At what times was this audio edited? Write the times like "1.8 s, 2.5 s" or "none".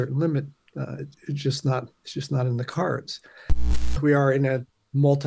3.8 s